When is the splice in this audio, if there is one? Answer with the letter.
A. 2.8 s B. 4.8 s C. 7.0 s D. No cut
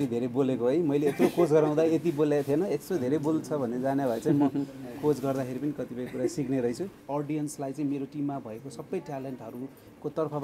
C